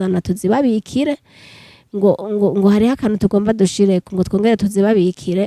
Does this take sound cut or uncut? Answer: uncut